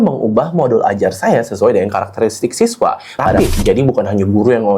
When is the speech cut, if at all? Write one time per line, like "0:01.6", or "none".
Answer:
0:03.4